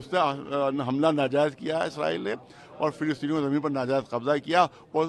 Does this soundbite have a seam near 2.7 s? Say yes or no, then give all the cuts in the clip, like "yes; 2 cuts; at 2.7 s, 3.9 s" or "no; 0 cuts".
no; 0 cuts